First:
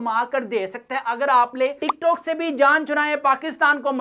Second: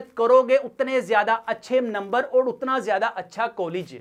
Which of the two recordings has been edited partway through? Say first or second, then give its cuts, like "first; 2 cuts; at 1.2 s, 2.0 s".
first; 1 cut; at 1.8 s